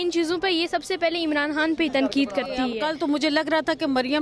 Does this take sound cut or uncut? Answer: cut